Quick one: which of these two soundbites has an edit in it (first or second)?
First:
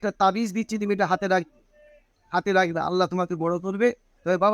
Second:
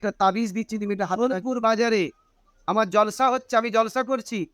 second